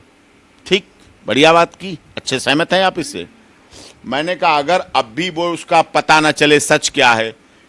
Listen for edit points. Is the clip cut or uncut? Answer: uncut